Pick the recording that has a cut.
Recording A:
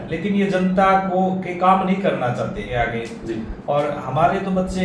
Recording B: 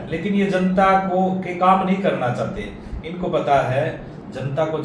A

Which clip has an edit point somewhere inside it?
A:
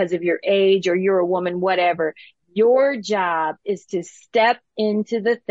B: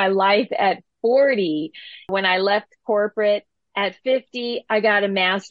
B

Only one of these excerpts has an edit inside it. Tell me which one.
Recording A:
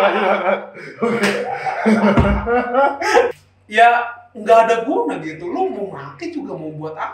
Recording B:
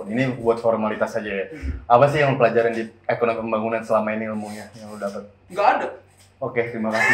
A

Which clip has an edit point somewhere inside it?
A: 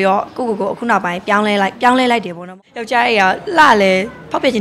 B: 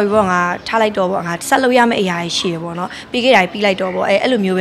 A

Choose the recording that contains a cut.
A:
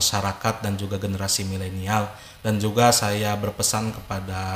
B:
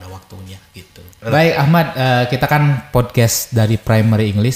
B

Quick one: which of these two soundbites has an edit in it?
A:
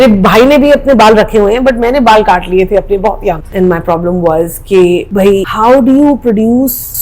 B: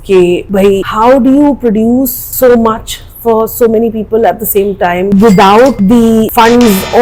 A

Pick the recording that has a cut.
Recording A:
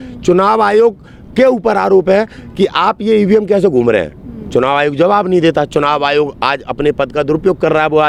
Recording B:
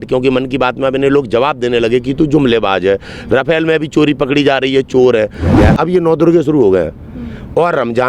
B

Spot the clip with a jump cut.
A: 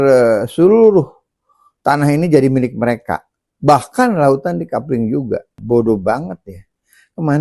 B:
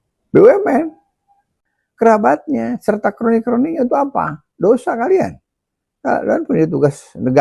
A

